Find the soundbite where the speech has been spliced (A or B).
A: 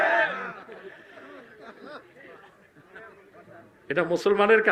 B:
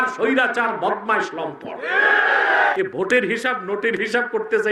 B